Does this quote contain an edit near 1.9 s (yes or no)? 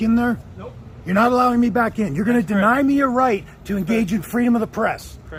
no